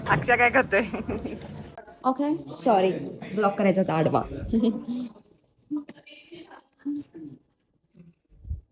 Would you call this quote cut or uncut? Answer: cut